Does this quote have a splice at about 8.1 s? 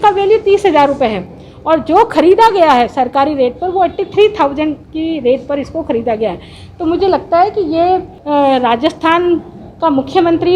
yes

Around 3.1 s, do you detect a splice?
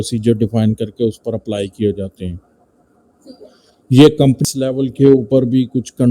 no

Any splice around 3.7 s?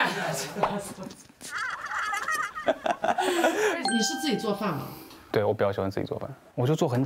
yes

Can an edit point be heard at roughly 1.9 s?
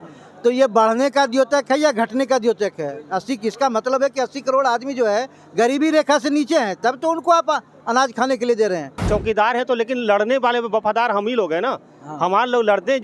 no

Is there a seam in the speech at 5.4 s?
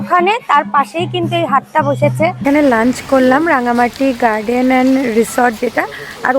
no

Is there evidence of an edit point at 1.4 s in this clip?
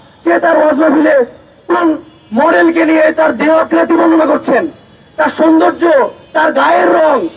no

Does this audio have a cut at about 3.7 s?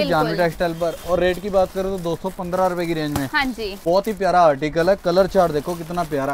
yes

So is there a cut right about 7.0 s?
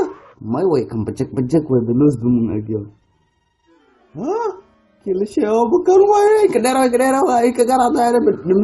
yes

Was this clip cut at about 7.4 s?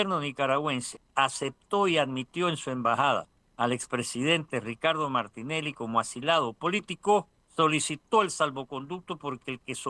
yes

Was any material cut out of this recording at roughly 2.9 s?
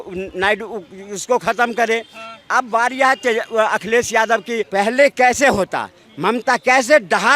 no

